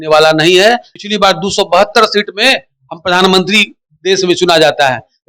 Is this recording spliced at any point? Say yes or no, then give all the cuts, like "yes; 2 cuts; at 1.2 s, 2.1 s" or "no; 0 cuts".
yes; 1 cut; at 1.0 s